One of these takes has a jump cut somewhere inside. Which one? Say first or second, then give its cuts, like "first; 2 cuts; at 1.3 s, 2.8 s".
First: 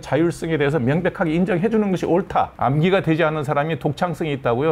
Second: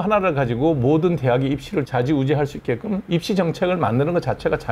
first; 1 cut; at 2.5 s